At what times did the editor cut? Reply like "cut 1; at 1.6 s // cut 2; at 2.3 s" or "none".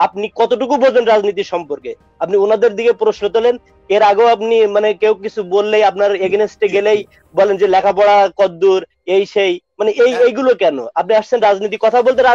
none